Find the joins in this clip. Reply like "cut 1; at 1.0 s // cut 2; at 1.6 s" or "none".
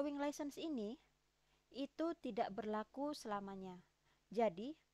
none